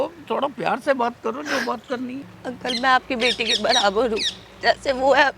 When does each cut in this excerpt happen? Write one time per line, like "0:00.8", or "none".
0:02.2